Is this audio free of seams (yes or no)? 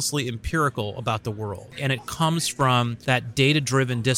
no